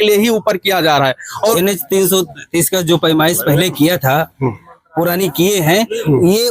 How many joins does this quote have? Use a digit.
1